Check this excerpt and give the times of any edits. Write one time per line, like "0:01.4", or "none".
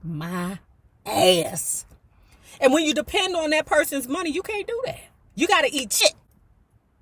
0:05.2